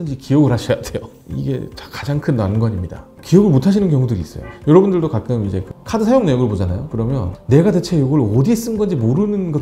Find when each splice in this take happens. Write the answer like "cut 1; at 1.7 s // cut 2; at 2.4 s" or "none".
none